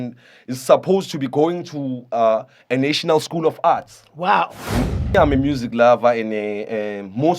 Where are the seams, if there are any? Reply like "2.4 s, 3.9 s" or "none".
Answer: 5.0 s